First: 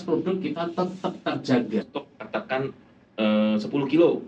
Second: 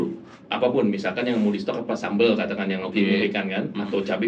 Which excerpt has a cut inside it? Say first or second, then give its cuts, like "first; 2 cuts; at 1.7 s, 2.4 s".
first; 1 cut; at 1.8 s